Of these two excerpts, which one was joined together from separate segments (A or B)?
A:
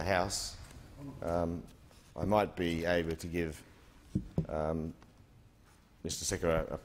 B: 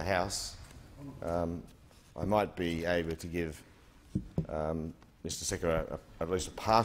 B